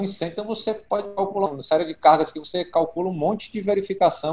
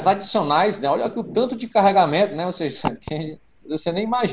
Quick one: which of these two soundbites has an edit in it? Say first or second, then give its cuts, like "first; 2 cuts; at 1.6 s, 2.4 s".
first; 1 cut; at 1.5 s